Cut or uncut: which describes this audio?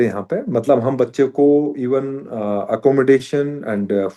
uncut